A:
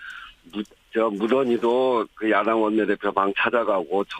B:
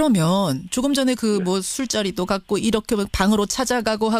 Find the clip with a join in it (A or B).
A